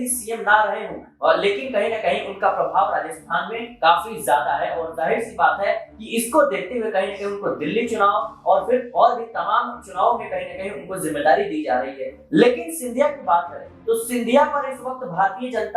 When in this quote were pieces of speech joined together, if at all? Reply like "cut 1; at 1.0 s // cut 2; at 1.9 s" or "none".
none

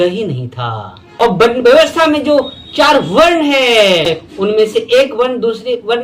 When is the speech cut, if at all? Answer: cut 1; at 1.2 s

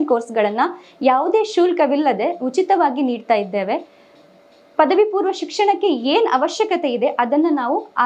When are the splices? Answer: none

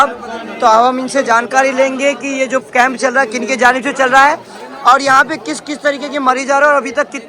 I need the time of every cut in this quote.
none

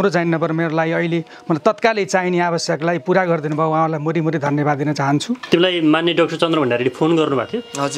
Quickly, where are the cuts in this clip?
cut 1; at 5.4 s

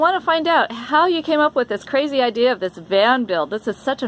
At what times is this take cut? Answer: none

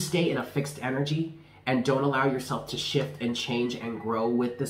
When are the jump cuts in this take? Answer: none

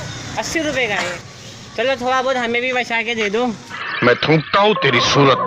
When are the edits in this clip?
cut 1; at 1.1 s // cut 2; at 3.8 s

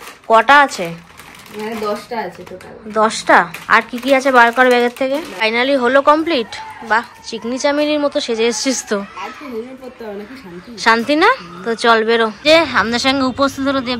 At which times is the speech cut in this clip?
cut 1; at 5.3 s // cut 2; at 12.7 s

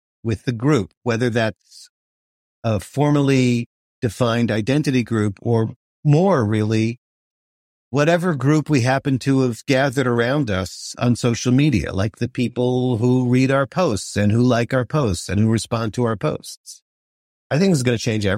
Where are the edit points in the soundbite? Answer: cut 1; at 17.3 s

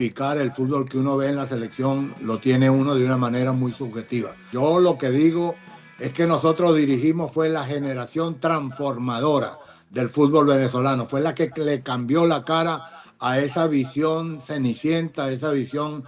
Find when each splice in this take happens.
cut 1; at 4.4 s

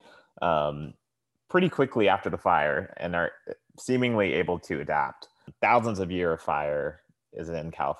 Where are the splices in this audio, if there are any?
cut 1; at 5.5 s

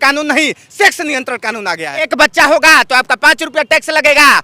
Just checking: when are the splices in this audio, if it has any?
cut 1; at 2.1 s

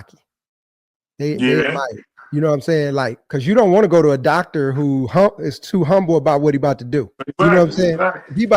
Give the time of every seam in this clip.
cut 1; at 3.2 s

